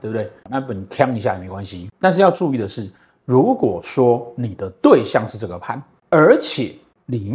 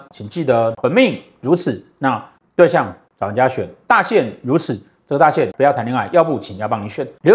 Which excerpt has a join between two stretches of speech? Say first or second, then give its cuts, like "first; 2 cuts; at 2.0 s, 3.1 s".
second; 1 cut; at 5.5 s